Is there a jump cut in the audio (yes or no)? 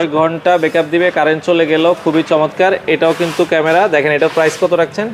no